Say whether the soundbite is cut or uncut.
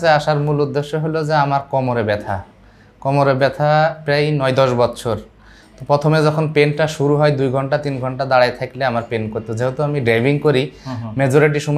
uncut